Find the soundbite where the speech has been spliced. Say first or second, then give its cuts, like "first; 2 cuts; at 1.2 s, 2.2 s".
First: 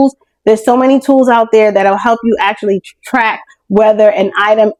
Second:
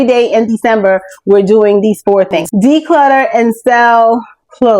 second; 1 cut; at 2.4 s